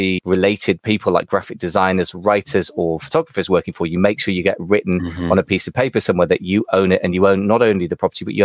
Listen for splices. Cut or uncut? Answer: uncut